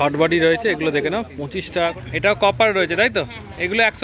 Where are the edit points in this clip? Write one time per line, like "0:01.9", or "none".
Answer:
0:02.0